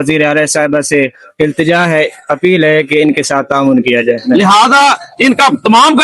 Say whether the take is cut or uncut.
cut